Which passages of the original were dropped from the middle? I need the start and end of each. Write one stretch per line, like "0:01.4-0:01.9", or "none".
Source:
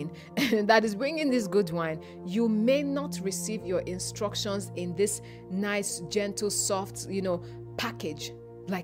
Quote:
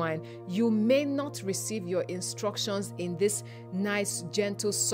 none